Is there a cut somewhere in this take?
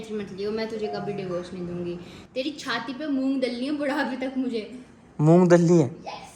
no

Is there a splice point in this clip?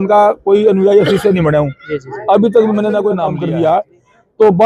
yes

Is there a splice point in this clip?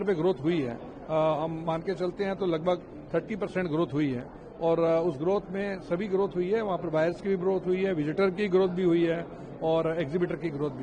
no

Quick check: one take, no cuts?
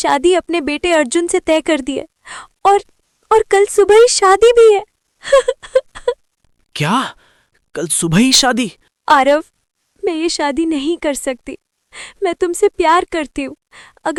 yes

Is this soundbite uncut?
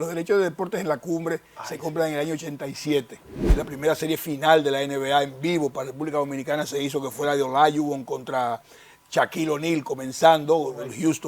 no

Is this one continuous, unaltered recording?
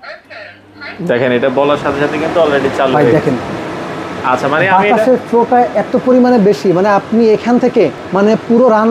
no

